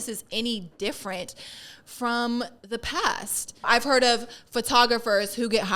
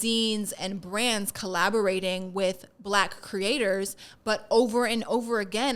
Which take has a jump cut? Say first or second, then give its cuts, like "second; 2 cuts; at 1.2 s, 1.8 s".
first; 1 cut; at 3.7 s